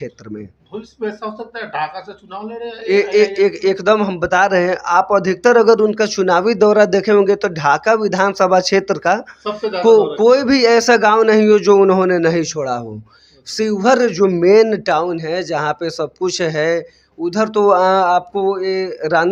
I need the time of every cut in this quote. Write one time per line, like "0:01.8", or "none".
none